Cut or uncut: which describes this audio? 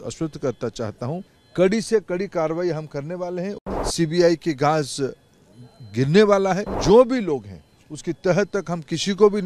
cut